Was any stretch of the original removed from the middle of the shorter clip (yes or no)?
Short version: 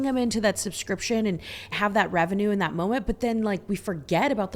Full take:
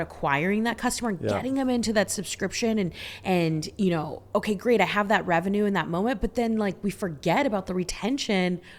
yes